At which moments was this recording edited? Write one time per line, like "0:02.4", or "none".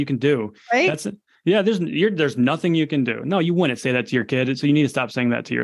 none